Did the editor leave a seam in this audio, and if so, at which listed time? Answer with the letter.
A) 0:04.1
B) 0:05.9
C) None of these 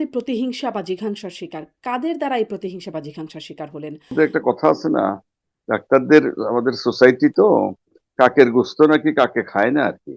A